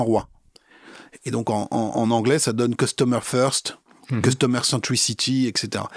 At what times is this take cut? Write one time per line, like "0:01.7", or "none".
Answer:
none

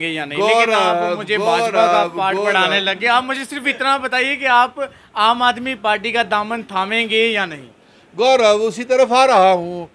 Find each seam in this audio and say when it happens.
none

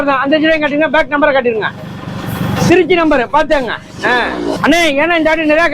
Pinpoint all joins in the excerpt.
0:04.0

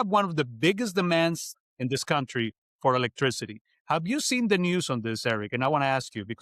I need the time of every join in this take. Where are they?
0:01.5

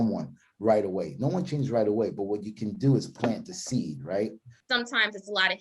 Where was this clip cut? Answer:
0:04.5

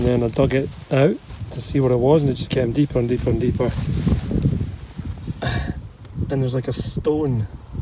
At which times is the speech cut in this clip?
none

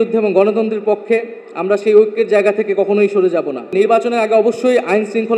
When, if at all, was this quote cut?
0:03.7

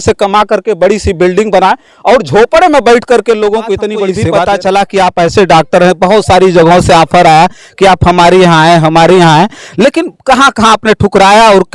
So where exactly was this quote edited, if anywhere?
0:04.3

